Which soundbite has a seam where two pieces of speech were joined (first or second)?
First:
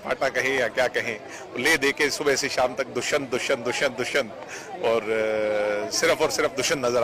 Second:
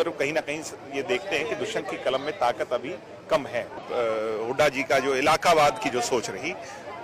second